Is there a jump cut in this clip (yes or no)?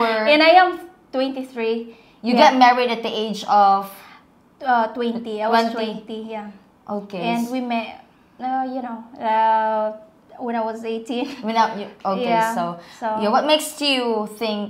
no